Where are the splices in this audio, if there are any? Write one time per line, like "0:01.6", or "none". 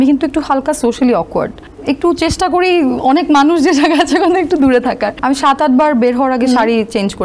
0:01.7
0:05.1